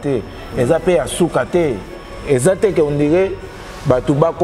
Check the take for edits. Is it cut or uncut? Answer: uncut